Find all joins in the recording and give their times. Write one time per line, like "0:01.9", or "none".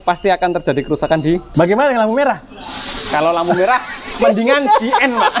0:01.5